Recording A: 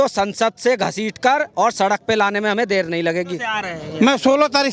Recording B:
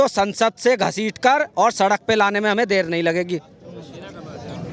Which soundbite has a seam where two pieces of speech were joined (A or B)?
A